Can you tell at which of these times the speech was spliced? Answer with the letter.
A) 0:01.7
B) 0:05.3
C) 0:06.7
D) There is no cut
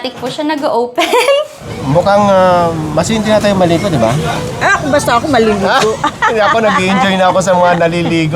A